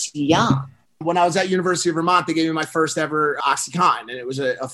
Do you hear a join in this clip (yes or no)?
yes